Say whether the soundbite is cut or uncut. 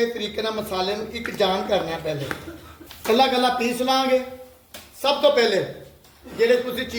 uncut